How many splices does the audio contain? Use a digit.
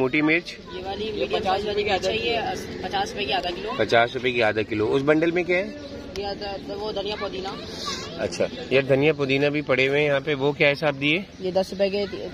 0